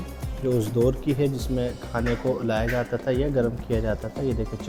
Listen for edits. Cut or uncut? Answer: uncut